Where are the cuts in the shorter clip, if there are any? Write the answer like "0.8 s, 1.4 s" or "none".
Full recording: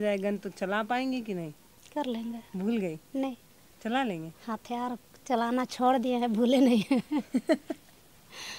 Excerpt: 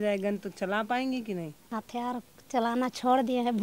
1.6 s